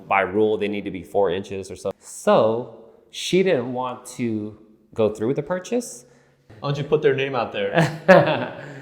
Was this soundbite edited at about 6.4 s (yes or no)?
yes